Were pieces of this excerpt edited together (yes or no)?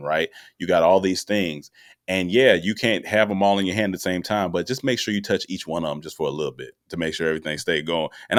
no